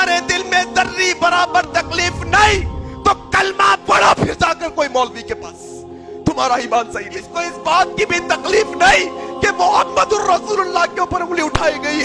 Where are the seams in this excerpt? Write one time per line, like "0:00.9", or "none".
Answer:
0:07.4